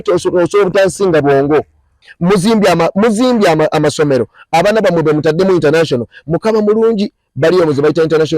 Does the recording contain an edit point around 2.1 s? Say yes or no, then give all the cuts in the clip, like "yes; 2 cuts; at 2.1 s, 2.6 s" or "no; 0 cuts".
yes; 1 cut; at 2.1 s